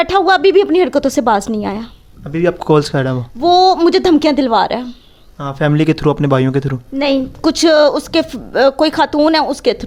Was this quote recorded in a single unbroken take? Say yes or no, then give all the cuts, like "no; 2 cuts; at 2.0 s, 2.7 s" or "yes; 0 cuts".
yes; 0 cuts